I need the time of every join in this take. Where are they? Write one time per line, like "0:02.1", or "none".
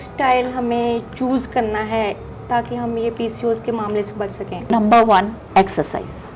0:04.7
0:05.4